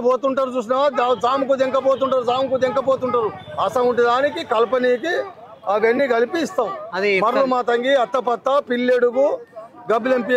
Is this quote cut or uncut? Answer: uncut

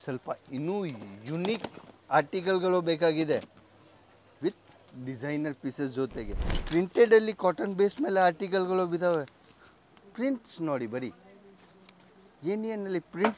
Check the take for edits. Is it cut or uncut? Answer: cut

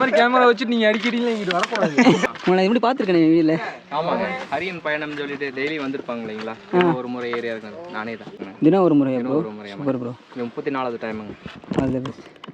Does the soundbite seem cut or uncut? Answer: cut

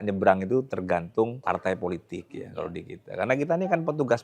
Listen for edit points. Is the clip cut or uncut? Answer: cut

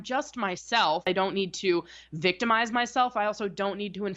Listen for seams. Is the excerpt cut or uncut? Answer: cut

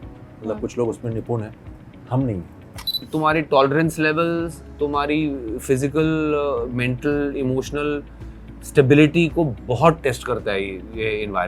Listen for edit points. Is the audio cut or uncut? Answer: cut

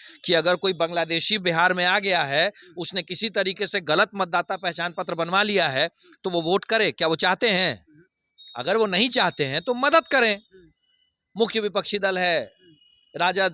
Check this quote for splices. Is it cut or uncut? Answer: uncut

